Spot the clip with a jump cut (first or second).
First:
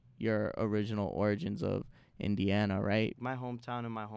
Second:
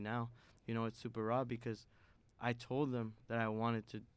first